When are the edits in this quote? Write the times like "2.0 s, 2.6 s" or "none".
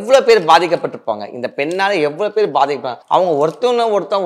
2.9 s